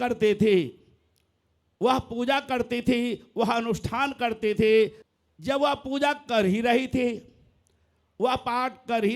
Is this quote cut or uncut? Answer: cut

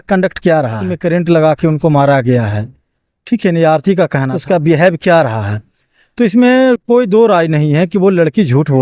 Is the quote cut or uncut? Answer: cut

